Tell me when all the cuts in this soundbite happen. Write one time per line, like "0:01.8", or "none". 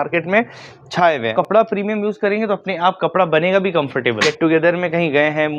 0:01.3
0:04.2

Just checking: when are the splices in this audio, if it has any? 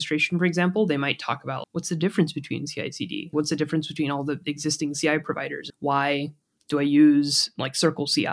0:01.6
0:03.3
0:05.6

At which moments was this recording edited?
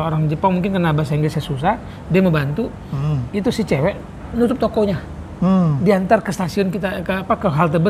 none

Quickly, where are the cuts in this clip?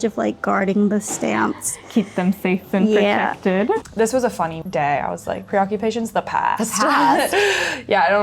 0:03.8
0:04.6

